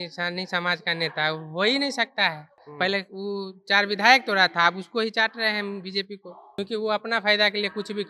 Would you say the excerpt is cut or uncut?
cut